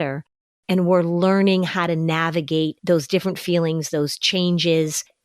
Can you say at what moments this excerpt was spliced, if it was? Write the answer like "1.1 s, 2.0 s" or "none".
2.8 s